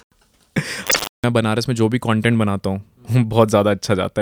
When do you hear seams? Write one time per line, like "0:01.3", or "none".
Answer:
0:01.1